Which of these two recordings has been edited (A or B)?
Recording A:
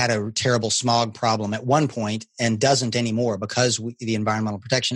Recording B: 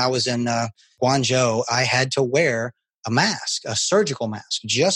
B